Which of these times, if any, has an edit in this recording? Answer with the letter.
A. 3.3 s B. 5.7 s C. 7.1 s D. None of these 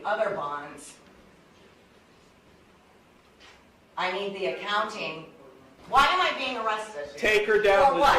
B